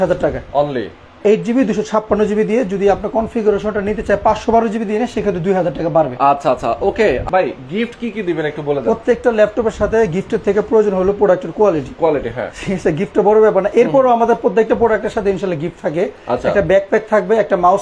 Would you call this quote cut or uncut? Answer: uncut